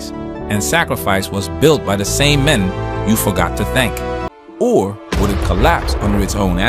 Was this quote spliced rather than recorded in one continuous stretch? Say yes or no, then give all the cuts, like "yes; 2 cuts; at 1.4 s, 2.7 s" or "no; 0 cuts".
yes; 1 cut; at 4.2 s